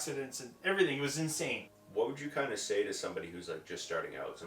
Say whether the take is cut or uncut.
cut